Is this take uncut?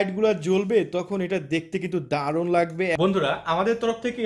no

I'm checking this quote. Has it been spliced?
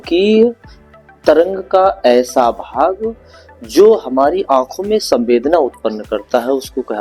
no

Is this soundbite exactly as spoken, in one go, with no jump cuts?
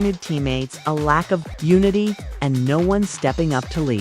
no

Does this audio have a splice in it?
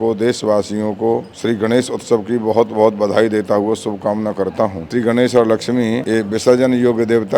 yes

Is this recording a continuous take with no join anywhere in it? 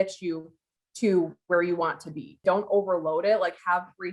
no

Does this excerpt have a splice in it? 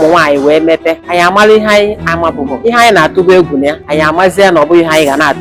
yes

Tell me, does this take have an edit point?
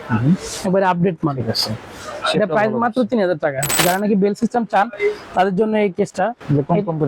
yes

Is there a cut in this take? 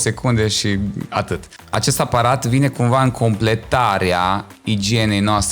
yes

